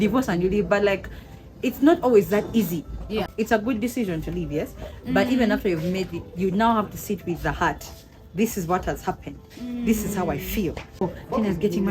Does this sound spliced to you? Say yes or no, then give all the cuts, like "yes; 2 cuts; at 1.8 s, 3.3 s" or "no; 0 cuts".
yes; 2 cuts; at 3.3 s, 11.0 s